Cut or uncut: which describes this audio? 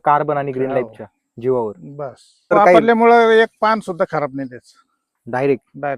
cut